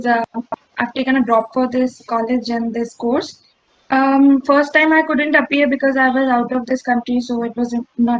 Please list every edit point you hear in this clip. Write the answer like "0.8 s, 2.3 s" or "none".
none